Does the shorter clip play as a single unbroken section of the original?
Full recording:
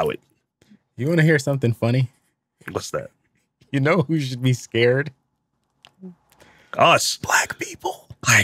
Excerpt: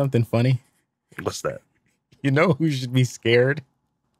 yes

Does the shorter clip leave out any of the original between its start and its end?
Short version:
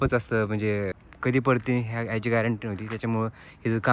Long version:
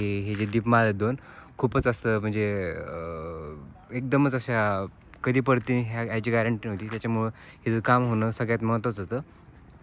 yes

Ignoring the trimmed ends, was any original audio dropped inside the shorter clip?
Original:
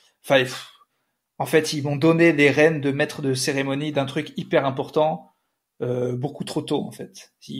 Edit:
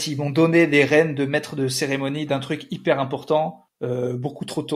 yes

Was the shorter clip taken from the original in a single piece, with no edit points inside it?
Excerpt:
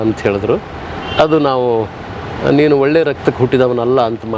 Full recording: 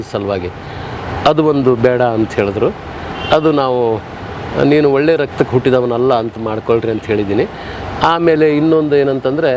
yes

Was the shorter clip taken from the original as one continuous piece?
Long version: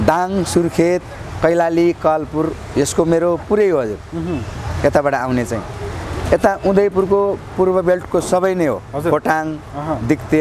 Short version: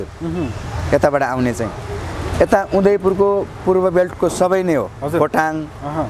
yes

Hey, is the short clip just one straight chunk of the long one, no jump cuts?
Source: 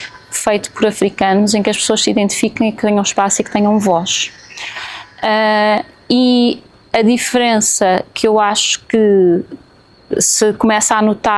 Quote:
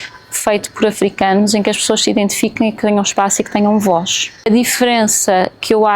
no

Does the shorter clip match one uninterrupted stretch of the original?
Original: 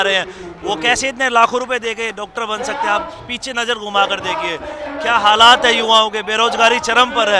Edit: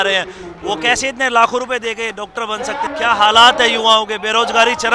no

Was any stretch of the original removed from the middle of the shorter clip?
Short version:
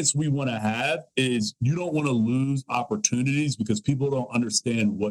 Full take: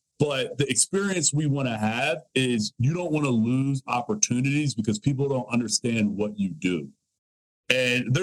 no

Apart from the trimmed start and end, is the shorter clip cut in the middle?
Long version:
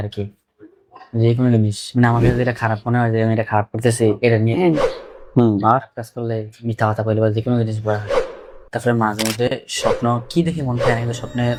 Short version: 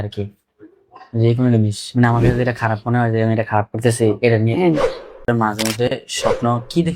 yes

